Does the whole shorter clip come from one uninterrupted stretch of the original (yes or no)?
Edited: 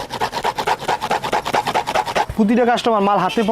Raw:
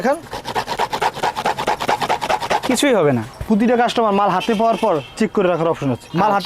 no